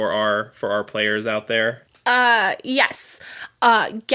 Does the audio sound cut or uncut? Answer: cut